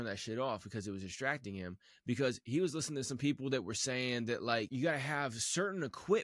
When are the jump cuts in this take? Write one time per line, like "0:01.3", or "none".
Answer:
0:04.7